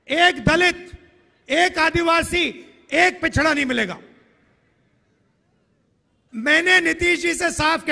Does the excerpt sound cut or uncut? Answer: cut